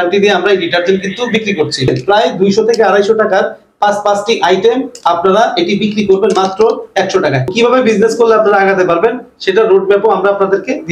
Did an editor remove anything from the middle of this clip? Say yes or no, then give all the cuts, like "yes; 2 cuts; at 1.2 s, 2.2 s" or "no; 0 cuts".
yes; 2 cuts; at 1.9 s, 7.5 s